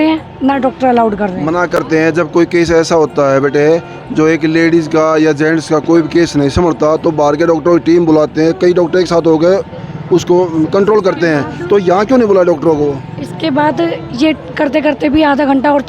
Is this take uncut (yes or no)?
yes